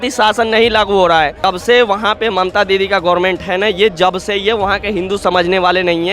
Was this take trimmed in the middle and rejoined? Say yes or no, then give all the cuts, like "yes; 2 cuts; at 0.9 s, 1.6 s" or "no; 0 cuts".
yes; 1 cut; at 1.4 s